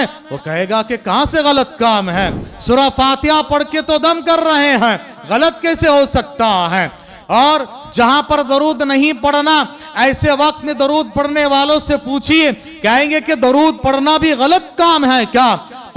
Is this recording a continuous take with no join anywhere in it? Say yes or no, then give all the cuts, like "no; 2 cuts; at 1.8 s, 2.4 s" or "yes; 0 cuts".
yes; 0 cuts